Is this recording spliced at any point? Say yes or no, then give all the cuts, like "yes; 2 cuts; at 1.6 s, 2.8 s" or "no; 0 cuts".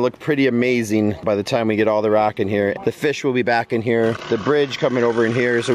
yes; 2 cuts; at 1.2 s, 2.8 s